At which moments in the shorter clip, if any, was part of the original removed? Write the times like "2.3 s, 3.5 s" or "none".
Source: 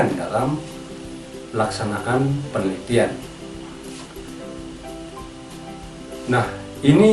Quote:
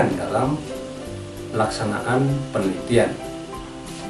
3.2 s